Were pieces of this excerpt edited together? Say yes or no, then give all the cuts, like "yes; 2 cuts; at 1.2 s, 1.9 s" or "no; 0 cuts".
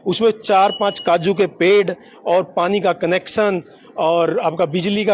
no; 0 cuts